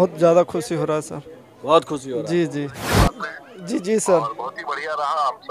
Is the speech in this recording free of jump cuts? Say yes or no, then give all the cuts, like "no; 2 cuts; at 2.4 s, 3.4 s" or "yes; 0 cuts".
no; 1 cut; at 2.8 s